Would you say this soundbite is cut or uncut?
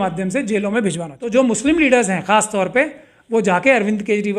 cut